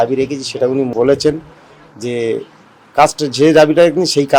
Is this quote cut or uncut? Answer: cut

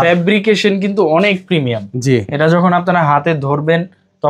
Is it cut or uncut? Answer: uncut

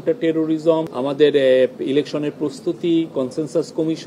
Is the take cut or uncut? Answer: cut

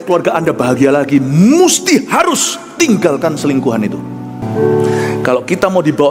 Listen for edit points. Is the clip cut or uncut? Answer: cut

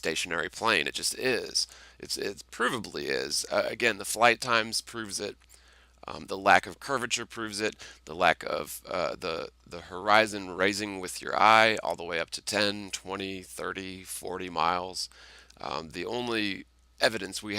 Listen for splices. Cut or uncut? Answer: cut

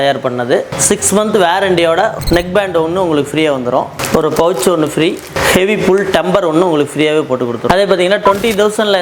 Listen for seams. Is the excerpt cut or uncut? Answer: uncut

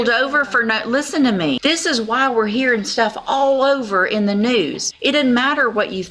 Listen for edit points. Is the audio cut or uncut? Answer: cut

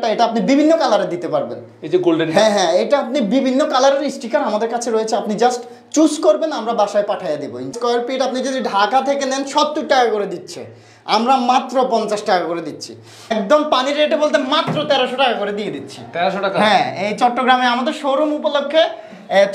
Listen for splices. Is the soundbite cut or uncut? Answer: cut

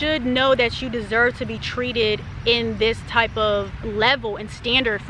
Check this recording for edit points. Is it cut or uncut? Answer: cut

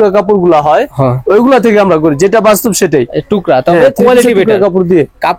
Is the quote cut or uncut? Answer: uncut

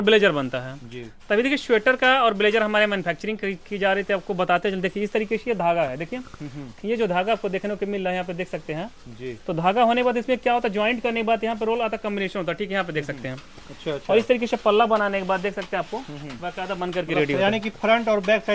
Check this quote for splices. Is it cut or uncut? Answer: uncut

